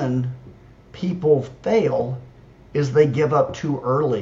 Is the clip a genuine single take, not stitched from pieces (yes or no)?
yes